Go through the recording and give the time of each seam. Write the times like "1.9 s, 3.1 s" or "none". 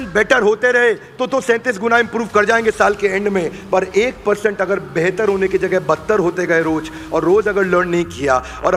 none